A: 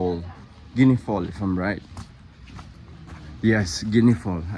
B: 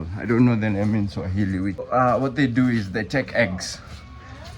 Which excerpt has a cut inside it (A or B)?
B